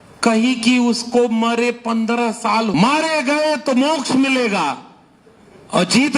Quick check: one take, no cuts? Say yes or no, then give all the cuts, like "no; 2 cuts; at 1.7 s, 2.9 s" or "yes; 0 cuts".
no; 1 cut; at 2.7 s